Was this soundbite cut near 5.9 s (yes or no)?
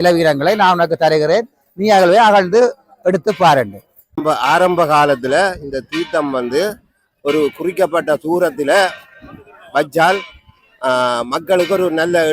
no